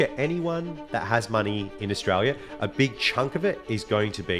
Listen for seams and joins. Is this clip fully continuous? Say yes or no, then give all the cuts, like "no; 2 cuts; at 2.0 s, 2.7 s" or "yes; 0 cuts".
yes; 0 cuts